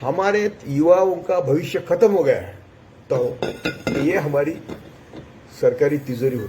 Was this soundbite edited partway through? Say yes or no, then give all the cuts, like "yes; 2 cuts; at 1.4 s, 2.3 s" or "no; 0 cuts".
yes; 1 cut; at 3.0 s